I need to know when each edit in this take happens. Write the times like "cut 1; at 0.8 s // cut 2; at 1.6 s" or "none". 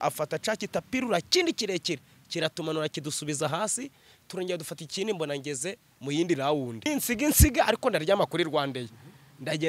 cut 1; at 6.9 s